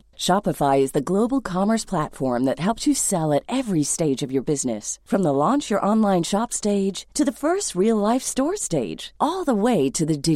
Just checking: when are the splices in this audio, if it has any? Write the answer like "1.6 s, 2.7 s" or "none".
none